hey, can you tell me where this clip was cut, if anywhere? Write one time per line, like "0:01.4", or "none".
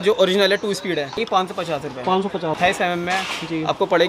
0:01.2
0:02.6